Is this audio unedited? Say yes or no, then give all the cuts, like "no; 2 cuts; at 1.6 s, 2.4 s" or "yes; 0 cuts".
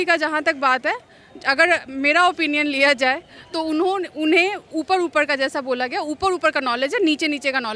yes; 0 cuts